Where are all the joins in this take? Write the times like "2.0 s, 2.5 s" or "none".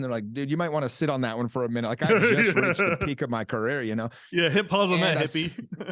none